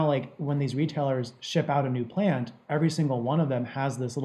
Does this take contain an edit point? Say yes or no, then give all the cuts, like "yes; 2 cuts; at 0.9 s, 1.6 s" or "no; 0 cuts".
no; 0 cuts